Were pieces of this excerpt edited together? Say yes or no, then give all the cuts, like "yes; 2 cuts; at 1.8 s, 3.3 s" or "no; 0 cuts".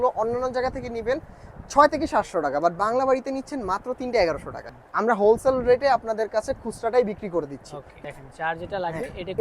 yes; 2 cuts; at 4.7 s, 7.9 s